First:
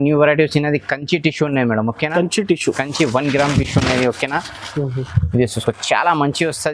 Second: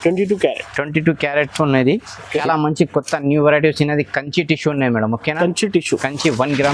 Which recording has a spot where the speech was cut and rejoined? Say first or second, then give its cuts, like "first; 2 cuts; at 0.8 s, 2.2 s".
second; 1 cut; at 2.3 s